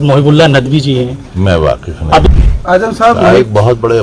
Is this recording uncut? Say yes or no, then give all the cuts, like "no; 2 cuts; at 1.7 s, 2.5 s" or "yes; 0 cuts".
no; 1 cut; at 2.3 s